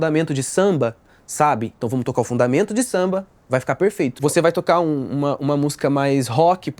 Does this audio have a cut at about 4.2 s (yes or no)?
yes